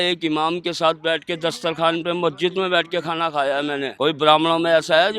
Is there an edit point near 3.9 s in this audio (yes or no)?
yes